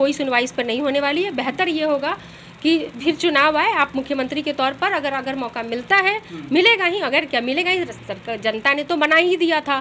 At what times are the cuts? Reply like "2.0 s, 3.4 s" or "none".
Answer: none